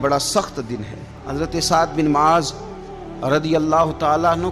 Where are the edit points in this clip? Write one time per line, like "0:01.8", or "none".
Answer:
0:01.2